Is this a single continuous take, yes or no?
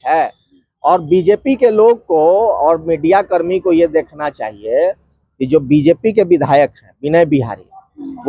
yes